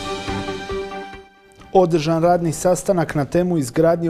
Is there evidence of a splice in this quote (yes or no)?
yes